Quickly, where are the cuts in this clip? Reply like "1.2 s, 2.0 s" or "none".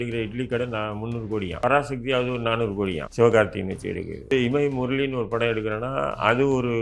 1.6 s, 3.0 s, 4.3 s